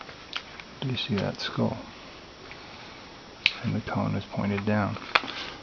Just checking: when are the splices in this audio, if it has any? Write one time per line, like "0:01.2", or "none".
0:01.8